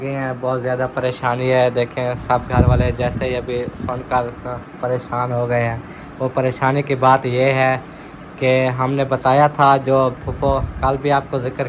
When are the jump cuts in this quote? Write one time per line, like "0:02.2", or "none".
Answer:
none